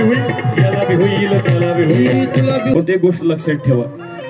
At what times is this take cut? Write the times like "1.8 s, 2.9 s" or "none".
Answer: 2.7 s